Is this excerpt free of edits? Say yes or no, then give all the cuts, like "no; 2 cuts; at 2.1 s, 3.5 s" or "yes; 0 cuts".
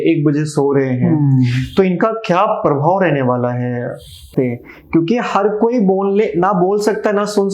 no; 1 cut; at 4.3 s